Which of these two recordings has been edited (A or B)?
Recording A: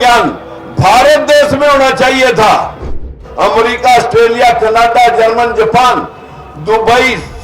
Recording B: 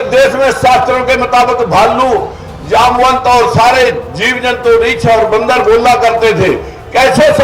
A